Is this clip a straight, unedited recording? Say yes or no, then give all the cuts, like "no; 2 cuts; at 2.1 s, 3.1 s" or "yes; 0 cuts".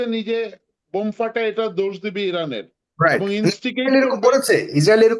yes; 0 cuts